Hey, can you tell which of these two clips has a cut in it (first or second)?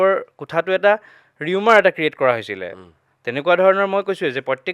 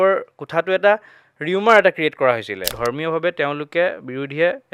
second